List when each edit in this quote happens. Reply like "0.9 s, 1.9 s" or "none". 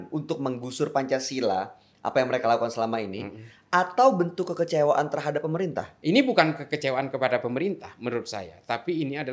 5.9 s